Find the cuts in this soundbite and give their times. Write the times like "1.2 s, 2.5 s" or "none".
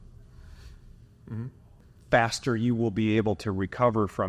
1.9 s